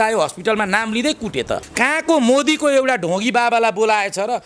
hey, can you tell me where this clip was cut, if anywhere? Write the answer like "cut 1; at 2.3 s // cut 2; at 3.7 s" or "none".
cut 1; at 1.7 s